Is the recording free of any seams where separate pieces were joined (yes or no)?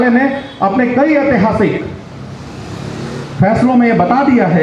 yes